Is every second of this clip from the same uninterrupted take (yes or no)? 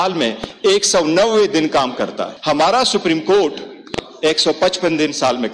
no